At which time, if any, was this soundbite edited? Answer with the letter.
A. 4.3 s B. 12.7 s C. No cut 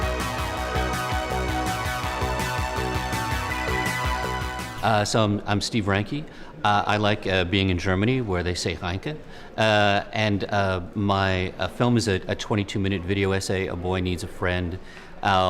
A